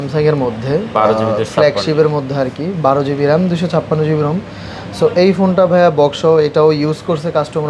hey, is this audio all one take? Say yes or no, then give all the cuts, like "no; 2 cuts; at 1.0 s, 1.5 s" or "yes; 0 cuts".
yes; 0 cuts